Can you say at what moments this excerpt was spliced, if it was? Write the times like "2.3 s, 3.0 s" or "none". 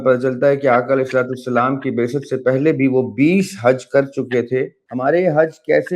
4.8 s

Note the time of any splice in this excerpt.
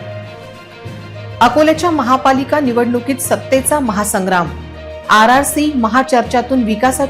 none

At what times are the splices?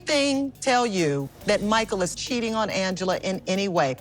1.3 s

